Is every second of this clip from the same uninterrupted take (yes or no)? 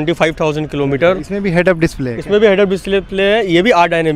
yes